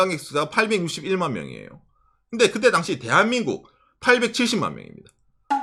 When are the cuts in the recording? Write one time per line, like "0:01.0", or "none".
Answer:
none